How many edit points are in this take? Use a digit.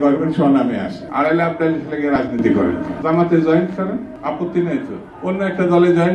0